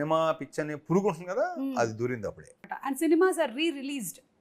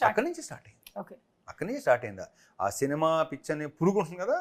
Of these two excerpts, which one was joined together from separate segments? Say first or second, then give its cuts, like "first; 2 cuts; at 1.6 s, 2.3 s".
first; 1 cut; at 2.6 s